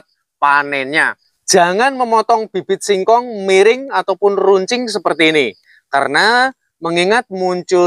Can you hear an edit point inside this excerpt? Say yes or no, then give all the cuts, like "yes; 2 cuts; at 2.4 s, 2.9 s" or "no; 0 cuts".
yes; 1 cut; at 1.1 s